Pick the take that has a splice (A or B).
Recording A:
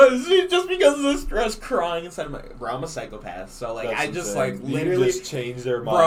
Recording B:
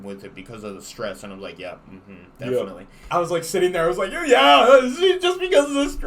B